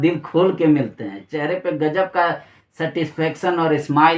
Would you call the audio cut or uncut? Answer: uncut